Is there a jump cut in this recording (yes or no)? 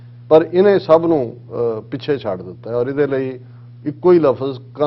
no